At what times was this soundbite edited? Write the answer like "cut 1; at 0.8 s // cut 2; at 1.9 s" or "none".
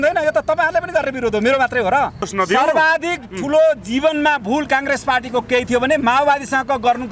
cut 1; at 2.3 s